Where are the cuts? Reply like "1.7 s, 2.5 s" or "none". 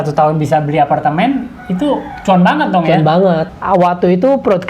3.5 s